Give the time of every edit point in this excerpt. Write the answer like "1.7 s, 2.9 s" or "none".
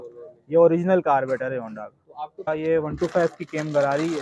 2.5 s